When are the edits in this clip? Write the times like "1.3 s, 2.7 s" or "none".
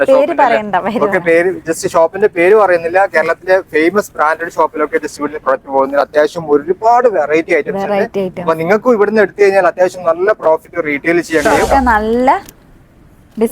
11.5 s